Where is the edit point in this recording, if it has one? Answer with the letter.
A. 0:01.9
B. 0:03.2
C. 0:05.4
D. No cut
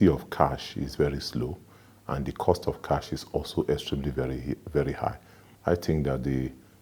C